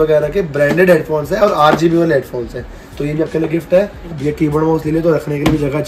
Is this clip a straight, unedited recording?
no; 1 cut; at 4.1 s

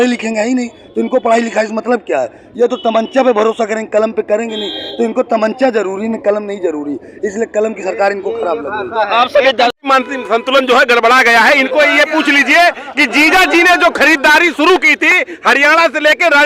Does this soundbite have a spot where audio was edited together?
yes; 1 cut; at 9.8 s

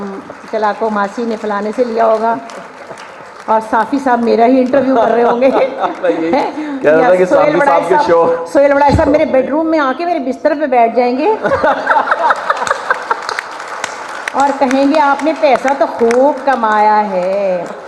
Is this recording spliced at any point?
no; 0 cuts

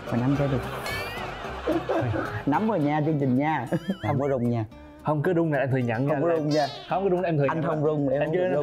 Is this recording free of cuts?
yes; 0 cuts

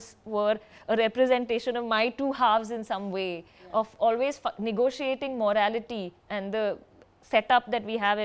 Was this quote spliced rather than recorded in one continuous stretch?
no; 0 cuts

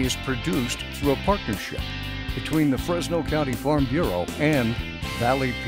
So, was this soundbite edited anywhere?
no; 0 cuts

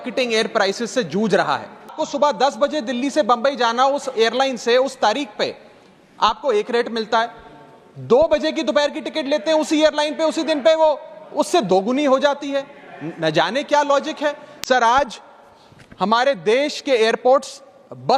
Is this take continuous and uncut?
no; 2 cuts; at 2.0 s, 14.5 s

